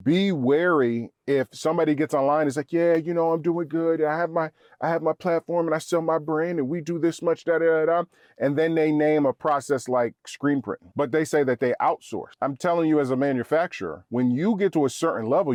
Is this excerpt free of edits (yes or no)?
yes